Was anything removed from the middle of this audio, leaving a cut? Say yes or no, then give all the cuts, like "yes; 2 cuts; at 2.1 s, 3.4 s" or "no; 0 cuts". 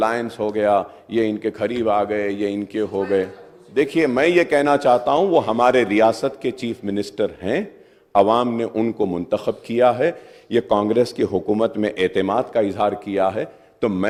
no; 0 cuts